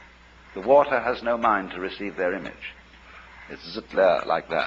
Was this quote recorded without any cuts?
no; 1 cut; at 2.4 s

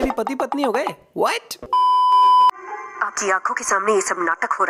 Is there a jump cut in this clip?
no; 0 cuts

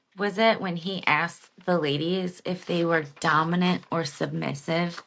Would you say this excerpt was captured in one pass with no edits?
yes; 0 cuts

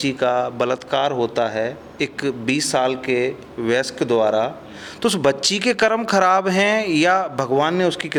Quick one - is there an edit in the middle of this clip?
no; 0 cuts

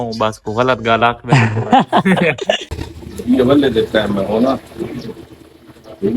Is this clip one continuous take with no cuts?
no; 1 cut; at 2.6 s

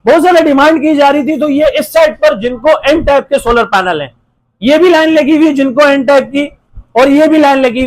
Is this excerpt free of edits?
yes; 0 cuts

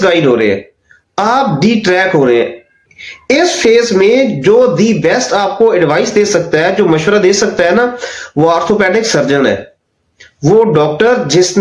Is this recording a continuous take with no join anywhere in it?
yes; 0 cuts

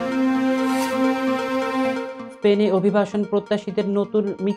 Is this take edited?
yes; 1 cut; at 2.2 s

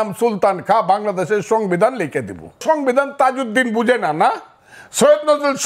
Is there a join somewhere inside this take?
yes; 1 cut; at 2.6 s

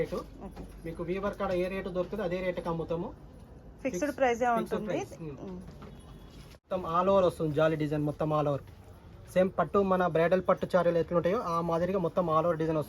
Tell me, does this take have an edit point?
yes; 1 cut; at 6.7 s

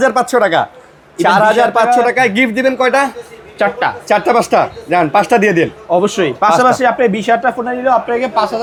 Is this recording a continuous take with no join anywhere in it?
yes; 0 cuts

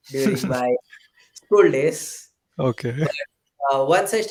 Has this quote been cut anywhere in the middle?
no; 0 cuts

